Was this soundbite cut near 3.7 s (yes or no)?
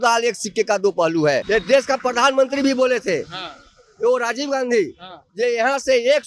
no